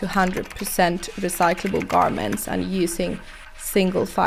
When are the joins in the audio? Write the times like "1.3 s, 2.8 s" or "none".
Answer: none